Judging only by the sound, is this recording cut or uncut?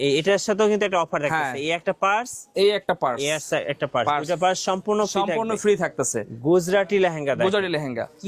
uncut